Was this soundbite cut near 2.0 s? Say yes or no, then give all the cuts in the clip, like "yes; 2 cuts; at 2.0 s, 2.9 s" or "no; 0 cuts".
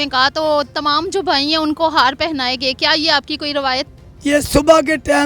no; 1 cut; at 3.9 s